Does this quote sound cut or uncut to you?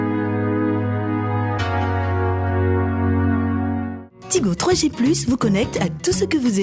cut